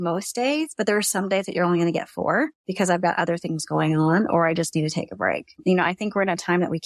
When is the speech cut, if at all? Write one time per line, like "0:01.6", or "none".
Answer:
0:02.6
0:05.6